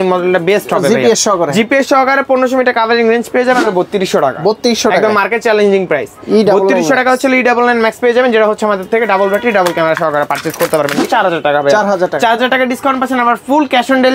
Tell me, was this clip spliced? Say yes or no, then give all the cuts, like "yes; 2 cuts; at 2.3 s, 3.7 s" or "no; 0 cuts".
yes; 2 cuts; at 3.6 s, 11.0 s